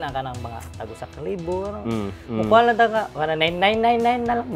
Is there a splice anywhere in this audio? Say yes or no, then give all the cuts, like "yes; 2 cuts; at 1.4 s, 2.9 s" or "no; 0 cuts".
yes; 1 cut; at 3.1 s